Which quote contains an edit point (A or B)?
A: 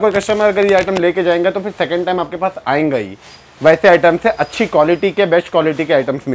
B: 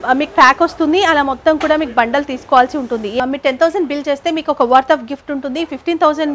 B